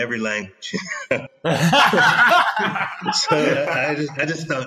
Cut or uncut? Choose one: cut